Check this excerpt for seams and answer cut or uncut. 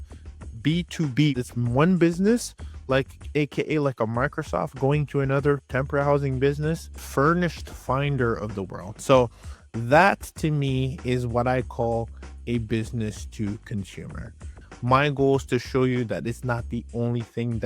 cut